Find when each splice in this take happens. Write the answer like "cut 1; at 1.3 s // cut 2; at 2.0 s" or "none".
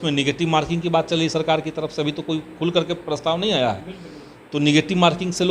none